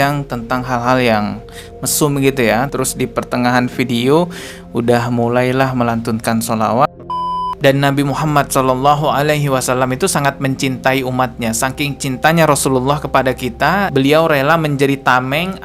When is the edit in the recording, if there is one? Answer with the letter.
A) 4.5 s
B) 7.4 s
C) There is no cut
B